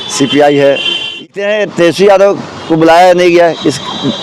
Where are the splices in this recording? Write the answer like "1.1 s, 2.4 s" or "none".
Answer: 1.2 s